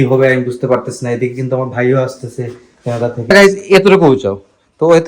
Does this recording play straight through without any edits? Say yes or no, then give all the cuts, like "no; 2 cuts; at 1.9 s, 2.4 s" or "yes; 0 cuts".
no; 1 cut; at 3.3 s